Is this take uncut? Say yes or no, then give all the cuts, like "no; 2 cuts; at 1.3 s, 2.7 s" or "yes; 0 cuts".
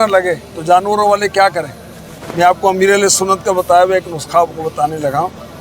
yes; 0 cuts